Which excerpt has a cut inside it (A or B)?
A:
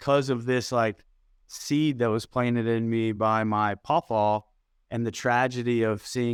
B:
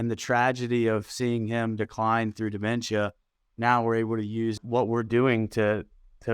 B